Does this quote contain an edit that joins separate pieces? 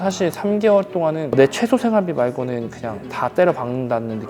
no; 0 cuts

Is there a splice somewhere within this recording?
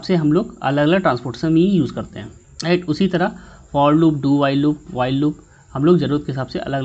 no; 0 cuts

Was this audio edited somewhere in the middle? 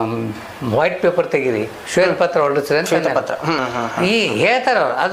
yes; 1 cut; at 3.6 s

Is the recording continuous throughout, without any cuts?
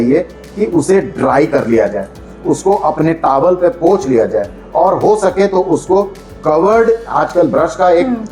yes; 0 cuts

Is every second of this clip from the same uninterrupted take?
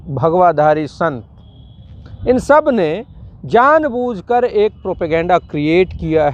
yes; 0 cuts

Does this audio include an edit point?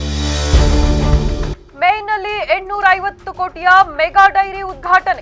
yes; 1 cut; at 1.6 s

